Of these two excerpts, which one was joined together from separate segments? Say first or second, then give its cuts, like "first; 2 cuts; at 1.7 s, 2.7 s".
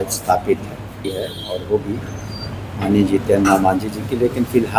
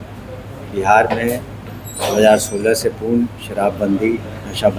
first; 1 cut; at 1.1 s